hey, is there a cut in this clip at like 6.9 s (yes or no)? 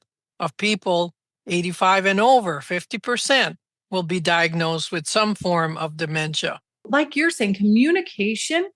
yes